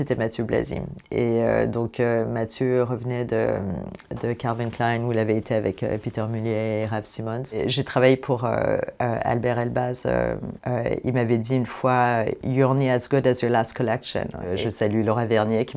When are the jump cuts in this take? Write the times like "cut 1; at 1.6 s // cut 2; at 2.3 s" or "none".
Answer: cut 1; at 7.6 s // cut 2; at 10.5 s // cut 3; at 14.5 s